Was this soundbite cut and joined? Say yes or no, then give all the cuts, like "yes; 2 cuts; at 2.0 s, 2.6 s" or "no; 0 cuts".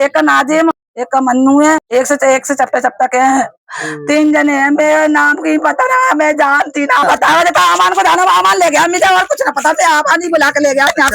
yes; 3 cuts; at 0.9 s, 1.8 s, 7.0 s